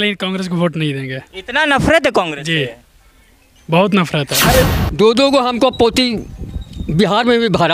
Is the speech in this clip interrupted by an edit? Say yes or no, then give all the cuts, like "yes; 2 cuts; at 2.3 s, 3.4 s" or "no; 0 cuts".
yes; 1 cut; at 4.8 s